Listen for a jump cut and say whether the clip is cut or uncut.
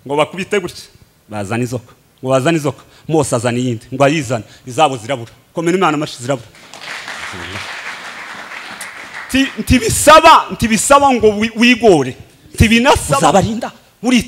cut